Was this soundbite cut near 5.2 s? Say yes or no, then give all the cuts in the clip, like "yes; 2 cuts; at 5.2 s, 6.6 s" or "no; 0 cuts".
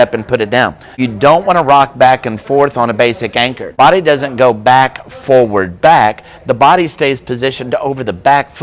no; 2 cuts; at 1.0 s, 3.8 s